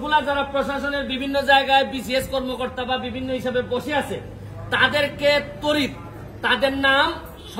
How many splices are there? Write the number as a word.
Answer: zero